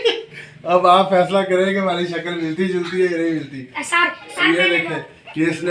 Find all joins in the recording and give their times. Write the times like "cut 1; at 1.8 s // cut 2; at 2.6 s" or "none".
cut 1; at 4.3 s